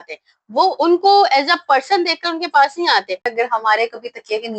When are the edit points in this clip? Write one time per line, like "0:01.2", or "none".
0:03.3